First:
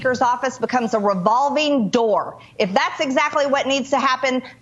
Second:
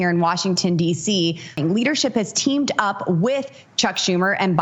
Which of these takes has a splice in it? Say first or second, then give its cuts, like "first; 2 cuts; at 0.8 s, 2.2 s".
second; 1 cut; at 1.6 s